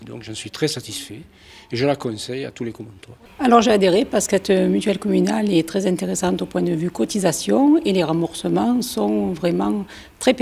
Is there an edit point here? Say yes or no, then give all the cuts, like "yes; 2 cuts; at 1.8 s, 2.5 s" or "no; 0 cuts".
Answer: yes; 1 cut; at 3.1 s